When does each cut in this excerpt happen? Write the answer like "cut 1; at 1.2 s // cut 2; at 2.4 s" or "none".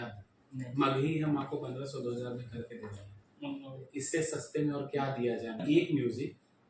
cut 1; at 5.6 s